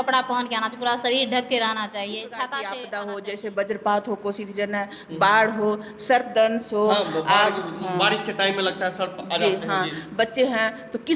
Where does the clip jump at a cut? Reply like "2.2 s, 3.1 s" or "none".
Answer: 2.8 s